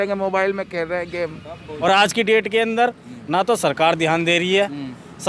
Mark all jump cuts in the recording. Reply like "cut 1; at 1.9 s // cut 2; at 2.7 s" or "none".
cut 1; at 1.8 s